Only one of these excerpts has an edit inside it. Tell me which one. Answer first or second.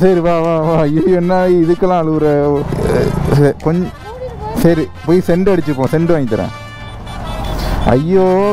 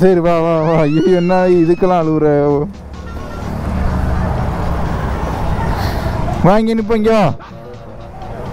first